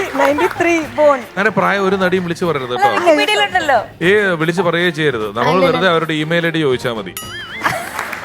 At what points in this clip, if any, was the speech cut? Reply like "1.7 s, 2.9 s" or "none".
1.4 s